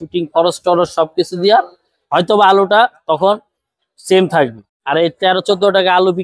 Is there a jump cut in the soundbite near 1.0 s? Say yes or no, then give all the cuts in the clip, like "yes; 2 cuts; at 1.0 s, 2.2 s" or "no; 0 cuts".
no; 1 cut; at 4.7 s